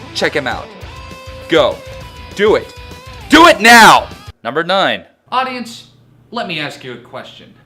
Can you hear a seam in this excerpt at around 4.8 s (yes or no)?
yes